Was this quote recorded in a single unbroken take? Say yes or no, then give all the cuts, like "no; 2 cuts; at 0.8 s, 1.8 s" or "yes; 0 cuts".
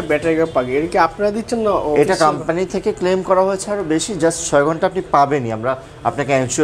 yes; 0 cuts